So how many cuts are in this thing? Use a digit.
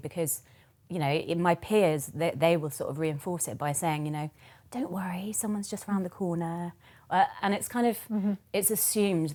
0